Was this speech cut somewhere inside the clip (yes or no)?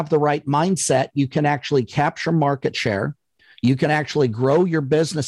no